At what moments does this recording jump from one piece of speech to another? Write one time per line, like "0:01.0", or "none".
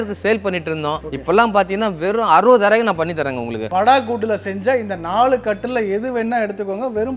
0:03.7